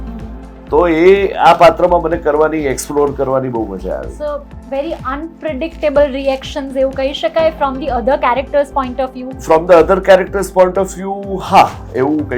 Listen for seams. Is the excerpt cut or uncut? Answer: uncut